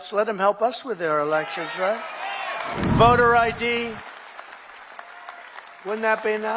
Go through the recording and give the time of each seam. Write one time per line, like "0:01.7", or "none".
0:02.7